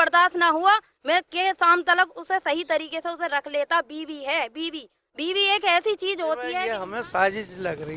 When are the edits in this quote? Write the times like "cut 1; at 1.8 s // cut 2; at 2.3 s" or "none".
cut 1; at 6.7 s